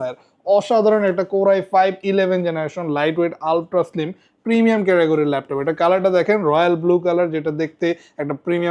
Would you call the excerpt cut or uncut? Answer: uncut